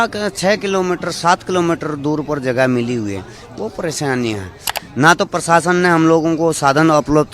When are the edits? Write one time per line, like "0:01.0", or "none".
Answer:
0:04.7